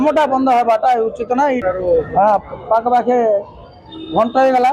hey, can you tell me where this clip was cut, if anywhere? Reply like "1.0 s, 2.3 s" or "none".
1.6 s